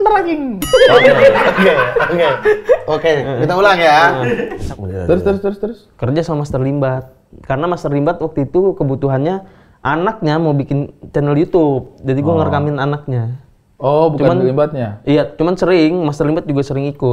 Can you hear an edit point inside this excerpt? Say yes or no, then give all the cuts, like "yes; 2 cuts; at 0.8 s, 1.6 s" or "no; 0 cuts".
yes; 1 cut; at 4.6 s